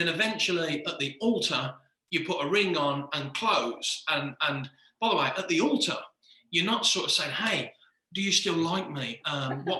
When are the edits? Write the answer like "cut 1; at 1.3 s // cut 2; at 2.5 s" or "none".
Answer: none